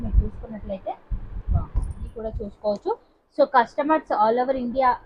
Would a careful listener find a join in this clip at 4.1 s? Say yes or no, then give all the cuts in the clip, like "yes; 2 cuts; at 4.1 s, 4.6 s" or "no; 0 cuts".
no; 1 cut; at 2.1 s